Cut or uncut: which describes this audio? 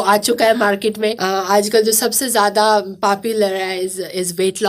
cut